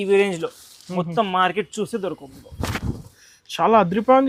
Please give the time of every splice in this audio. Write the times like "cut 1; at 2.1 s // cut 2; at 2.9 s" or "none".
none